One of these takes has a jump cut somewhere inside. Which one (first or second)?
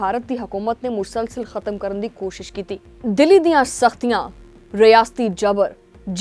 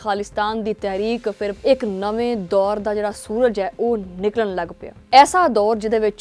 second